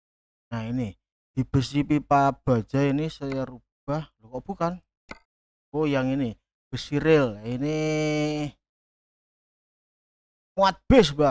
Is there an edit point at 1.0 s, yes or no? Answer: no